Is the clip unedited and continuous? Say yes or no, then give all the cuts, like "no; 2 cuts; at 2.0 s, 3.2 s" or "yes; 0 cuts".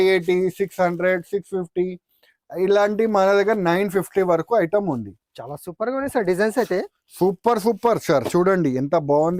yes; 0 cuts